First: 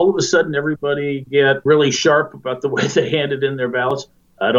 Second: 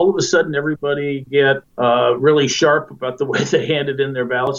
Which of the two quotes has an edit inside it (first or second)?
first